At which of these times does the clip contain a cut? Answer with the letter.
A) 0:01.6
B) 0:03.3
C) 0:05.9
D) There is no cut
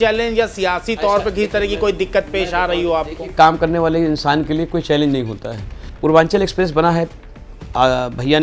C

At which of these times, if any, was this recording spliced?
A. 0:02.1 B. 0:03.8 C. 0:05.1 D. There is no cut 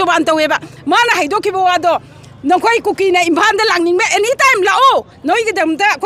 D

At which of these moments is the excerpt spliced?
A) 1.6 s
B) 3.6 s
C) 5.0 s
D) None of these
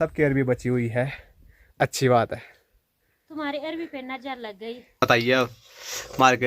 C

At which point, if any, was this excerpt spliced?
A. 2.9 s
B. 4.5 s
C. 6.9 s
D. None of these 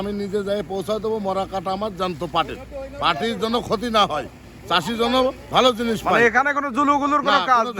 D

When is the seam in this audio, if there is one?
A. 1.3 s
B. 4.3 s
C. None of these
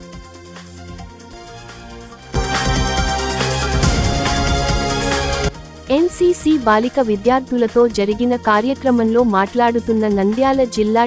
A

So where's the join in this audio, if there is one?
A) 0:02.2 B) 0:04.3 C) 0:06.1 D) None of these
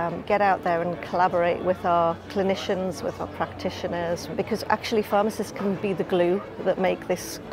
B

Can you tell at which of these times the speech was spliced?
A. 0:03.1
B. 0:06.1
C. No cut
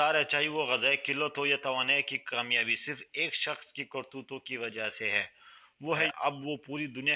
B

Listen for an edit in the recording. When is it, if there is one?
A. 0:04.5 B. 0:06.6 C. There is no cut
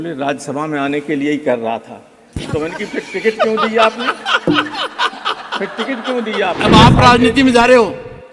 B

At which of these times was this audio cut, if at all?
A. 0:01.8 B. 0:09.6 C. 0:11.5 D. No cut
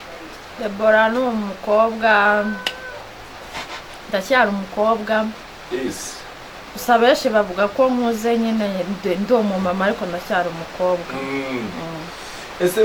D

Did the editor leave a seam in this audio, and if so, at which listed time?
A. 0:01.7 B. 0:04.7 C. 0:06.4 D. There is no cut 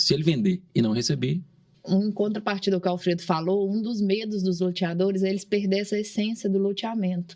A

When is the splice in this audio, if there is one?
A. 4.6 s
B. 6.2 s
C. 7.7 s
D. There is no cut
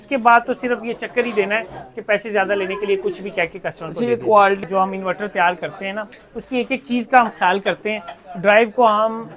A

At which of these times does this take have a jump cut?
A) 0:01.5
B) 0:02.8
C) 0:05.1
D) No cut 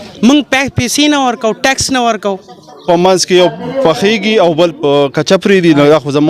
B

